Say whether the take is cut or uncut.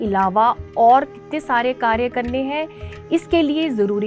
uncut